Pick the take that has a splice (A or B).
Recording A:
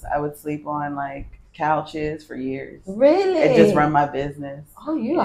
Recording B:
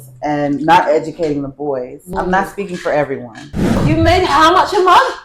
B